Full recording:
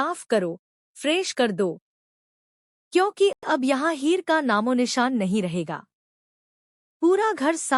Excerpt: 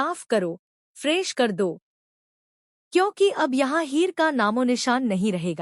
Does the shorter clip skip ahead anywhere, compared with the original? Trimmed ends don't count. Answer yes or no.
yes